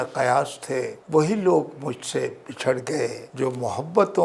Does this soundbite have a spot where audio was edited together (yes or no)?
yes